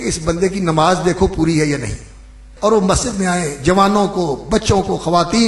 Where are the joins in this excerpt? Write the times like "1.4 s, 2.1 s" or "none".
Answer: 2.4 s

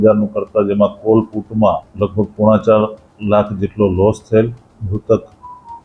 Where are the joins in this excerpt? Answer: 1.9 s, 4.7 s

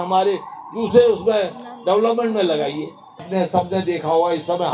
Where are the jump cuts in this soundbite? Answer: 3.2 s

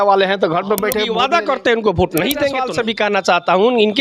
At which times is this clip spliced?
1.1 s, 2.8 s

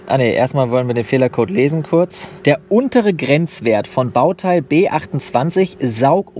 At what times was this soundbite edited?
none

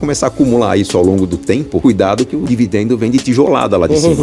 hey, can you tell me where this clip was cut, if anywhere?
1.8 s

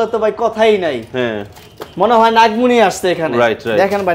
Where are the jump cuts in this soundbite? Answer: none

